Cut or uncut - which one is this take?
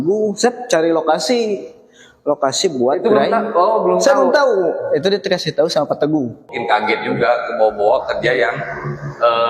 cut